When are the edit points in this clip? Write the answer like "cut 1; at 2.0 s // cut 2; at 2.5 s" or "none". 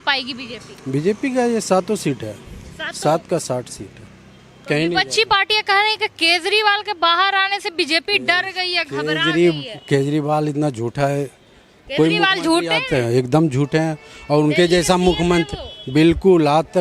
none